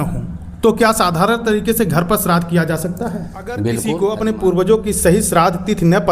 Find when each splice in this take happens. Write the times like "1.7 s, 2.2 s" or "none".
3.8 s